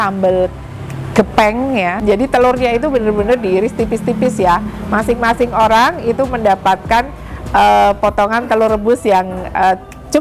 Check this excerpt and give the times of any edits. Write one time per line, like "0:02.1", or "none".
0:02.0